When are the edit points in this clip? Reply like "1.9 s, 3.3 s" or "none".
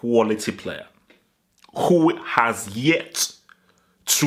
none